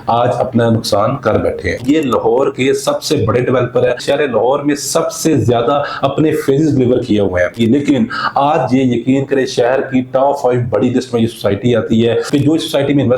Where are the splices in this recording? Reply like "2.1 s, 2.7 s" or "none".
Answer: 1.8 s, 4.0 s, 7.5 s, 12.2 s